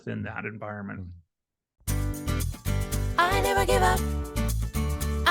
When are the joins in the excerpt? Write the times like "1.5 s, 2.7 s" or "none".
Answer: 1.7 s